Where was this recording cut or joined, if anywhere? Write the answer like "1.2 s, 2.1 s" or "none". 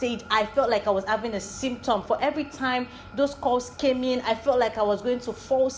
none